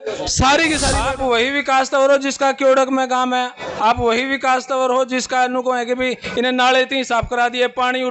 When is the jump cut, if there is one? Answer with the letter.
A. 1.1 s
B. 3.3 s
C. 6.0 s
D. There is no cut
A